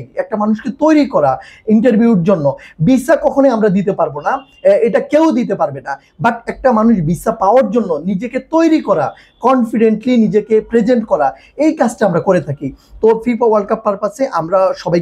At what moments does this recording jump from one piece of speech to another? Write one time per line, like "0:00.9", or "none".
none